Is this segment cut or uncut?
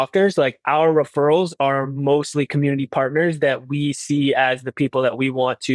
uncut